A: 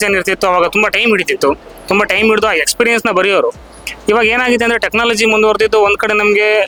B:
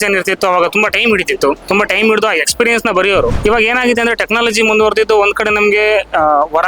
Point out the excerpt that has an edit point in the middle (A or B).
B